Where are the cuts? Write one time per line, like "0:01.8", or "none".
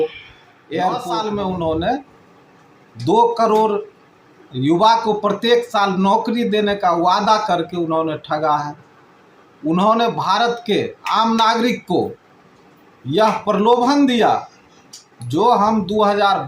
0:01.1